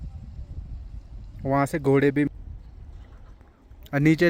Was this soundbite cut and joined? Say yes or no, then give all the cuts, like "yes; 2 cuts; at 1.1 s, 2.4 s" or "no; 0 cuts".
yes; 1 cut; at 2.3 s